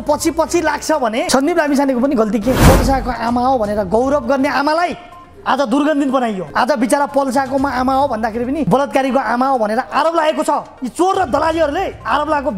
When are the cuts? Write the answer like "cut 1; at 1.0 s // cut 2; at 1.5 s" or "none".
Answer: cut 1; at 1.3 s // cut 2; at 2.6 s // cut 3; at 6.4 s // cut 4; at 8.7 s